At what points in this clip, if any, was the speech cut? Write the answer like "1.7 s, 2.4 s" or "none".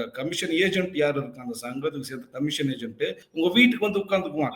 3.2 s